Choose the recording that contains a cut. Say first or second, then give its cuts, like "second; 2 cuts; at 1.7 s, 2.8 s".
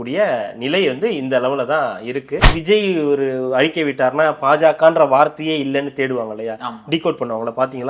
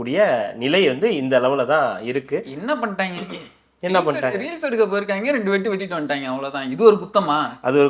first; 1 cut; at 2.5 s